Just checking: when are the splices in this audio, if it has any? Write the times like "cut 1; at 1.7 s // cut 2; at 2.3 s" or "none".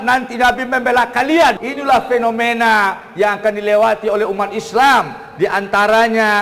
cut 1; at 1.6 s